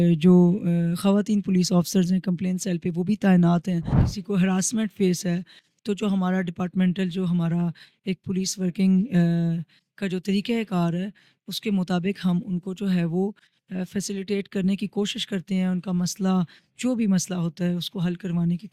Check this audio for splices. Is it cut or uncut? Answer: cut